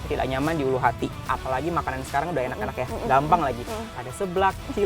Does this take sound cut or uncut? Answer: cut